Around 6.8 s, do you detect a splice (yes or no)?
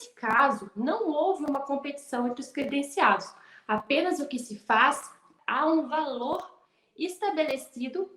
no